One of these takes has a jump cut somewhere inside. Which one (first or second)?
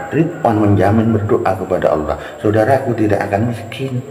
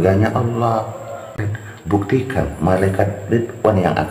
second